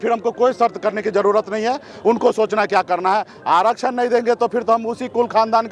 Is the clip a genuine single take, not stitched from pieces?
yes; 0 cuts

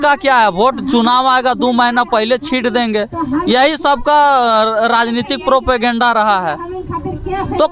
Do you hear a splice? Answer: no; 0 cuts

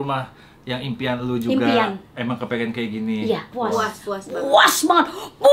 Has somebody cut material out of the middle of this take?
yes; 1 cut; at 3.5 s

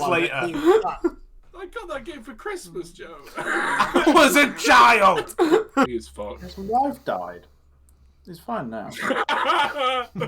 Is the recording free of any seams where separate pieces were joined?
no; 1 cut; at 5.9 s

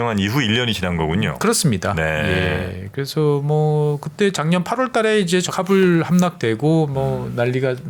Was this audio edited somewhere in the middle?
no; 0 cuts

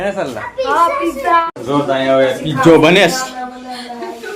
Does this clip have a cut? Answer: yes; 1 cut; at 1.4 s

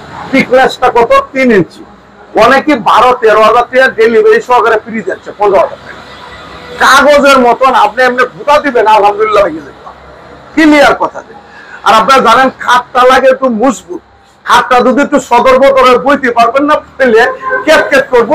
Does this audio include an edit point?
no; 0 cuts

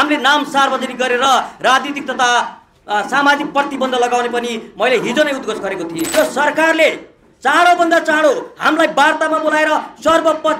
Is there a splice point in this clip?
yes; 1 cut; at 6.0 s

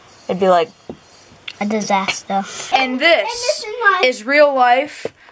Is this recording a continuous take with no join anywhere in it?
no; 1 cut; at 2.6 s

